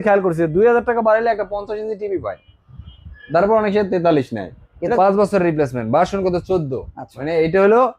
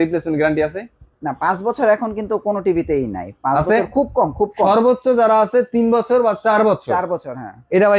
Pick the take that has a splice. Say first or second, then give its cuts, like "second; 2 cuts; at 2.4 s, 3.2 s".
first; 1 cut; at 4.9 s